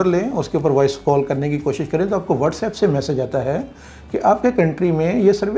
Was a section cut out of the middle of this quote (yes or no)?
no